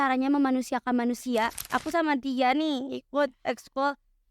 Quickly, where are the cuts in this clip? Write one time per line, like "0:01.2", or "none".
0:01.5